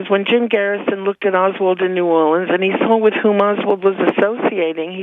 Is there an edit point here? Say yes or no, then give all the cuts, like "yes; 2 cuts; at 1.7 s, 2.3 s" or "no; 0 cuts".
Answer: no; 0 cuts